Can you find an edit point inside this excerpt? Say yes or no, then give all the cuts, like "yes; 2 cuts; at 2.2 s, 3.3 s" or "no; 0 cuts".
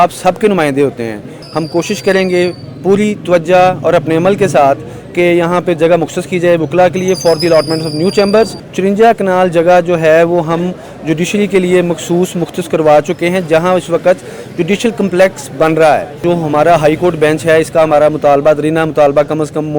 yes; 3 cuts; at 1.4 s, 8.6 s, 16.2 s